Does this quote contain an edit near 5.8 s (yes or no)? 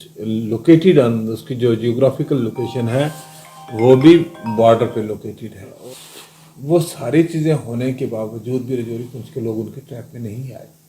yes